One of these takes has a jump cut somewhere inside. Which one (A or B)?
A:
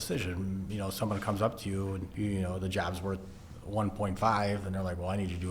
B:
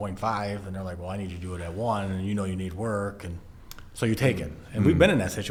A